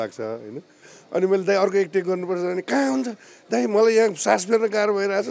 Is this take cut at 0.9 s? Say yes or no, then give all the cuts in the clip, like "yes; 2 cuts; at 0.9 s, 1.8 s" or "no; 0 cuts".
yes; 1 cut; at 0.9 s